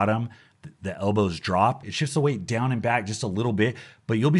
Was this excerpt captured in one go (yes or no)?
no